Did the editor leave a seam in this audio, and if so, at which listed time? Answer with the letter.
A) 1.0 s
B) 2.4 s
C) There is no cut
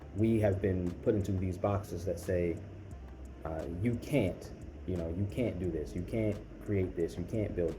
C